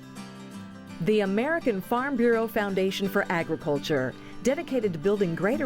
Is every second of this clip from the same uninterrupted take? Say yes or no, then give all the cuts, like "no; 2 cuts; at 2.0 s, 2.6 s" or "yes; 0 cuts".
no; 1 cut; at 1.0 s